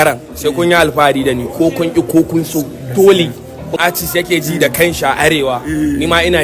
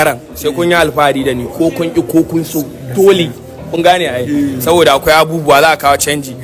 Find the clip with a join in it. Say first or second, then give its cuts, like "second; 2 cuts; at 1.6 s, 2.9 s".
first; 1 cut; at 3.7 s